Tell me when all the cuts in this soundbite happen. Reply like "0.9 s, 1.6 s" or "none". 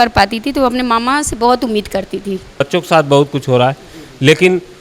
2.6 s